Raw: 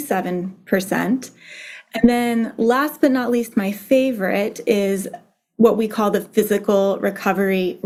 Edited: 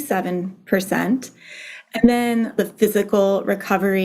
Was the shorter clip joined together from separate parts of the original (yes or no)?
yes